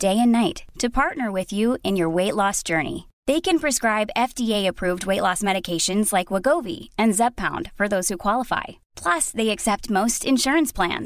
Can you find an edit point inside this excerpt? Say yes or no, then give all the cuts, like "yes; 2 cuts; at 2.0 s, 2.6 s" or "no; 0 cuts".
no; 0 cuts